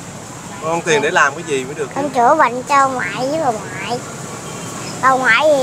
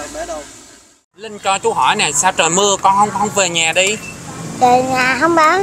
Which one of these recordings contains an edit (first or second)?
second